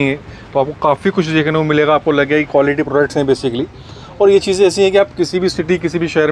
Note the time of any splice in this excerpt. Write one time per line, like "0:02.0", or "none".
none